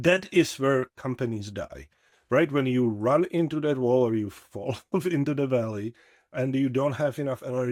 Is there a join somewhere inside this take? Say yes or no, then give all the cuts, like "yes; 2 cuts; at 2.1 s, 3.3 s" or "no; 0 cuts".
no; 0 cuts